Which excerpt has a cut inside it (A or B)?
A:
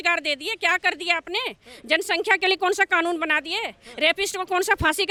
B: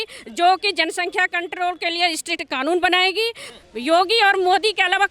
B